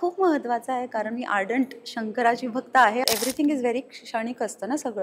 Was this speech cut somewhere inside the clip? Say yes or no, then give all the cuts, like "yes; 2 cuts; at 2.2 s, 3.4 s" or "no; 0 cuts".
yes; 1 cut; at 3.0 s